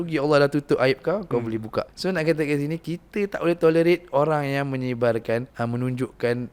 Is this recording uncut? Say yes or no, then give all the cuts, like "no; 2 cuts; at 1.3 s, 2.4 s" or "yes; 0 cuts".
no; 2 cuts; at 1.9 s, 5.5 s